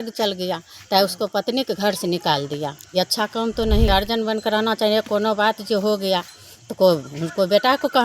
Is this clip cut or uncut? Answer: cut